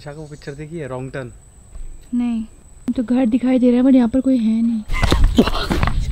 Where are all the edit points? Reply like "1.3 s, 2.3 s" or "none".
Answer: 2.6 s, 4.9 s